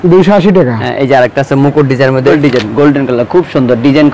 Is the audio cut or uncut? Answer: cut